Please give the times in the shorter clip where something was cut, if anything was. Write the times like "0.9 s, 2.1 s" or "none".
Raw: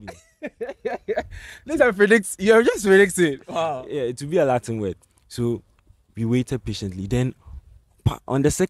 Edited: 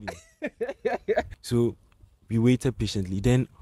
1.4 s